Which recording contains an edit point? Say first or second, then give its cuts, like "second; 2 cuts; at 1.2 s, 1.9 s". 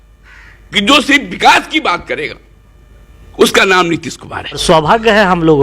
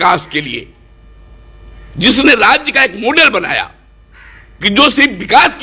first; 1 cut; at 4.6 s